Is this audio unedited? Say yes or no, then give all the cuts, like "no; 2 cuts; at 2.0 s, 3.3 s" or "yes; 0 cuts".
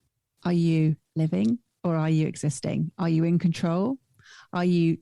yes; 0 cuts